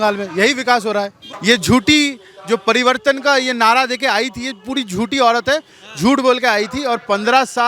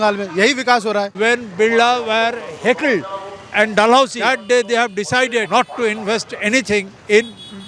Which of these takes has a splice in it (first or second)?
second